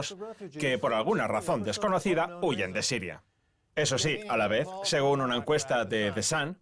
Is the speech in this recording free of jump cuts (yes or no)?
no